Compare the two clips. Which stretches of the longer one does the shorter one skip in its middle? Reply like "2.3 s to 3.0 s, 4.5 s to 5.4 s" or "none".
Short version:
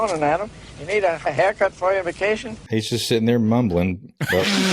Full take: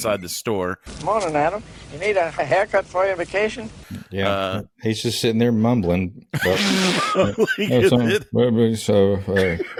3.7 s to 4.7 s